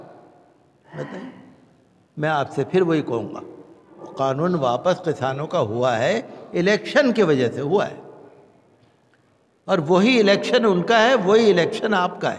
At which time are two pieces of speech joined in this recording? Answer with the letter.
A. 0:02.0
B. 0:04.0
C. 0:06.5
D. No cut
B